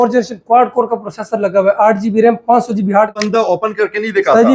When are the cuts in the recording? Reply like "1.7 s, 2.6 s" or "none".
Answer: 3.2 s